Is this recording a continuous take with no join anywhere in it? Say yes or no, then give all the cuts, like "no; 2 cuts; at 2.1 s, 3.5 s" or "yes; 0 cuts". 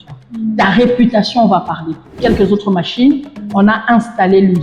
no; 1 cut; at 2.2 s